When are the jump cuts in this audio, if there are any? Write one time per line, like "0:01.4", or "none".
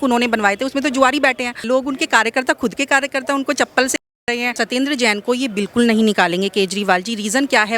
0:01.6
0:04.5